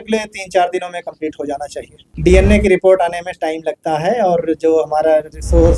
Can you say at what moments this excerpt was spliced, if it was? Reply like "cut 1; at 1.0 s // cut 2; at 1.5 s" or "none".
cut 1; at 2.1 s